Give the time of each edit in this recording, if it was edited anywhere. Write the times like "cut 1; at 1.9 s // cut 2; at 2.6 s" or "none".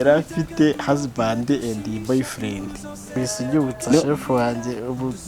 cut 1; at 3.1 s